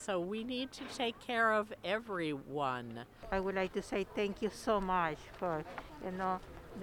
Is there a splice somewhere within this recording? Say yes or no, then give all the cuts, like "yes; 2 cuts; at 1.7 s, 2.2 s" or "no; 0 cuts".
yes; 1 cut; at 3.2 s